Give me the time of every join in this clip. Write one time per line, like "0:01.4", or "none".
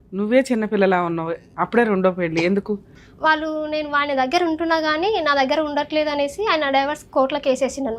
0:02.9